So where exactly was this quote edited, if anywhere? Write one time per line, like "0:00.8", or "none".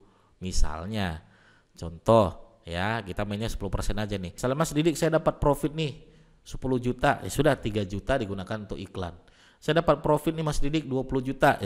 0:04.3